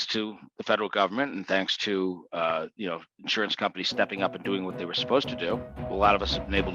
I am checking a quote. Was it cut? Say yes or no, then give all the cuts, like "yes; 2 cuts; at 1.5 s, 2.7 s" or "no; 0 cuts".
yes; 1 cut; at 5.8 s